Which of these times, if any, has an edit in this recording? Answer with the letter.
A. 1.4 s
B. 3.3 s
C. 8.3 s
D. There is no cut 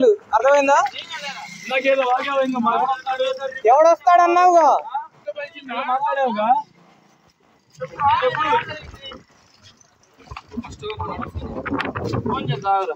D